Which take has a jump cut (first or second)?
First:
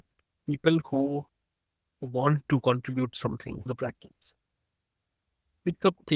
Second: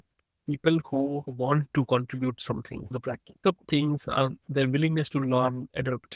second